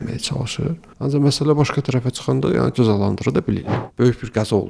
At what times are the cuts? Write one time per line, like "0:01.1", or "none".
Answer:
0:00.9
0:03.8